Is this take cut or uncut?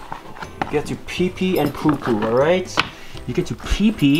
uncut